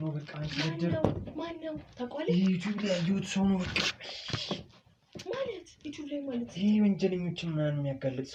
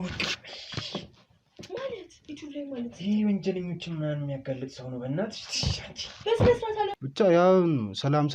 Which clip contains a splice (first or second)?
second